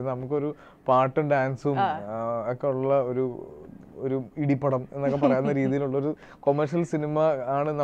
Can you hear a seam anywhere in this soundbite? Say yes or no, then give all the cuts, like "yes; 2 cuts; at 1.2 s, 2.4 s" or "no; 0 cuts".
no; 0 cuts